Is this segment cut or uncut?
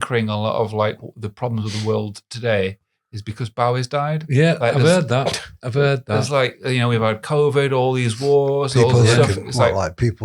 uncut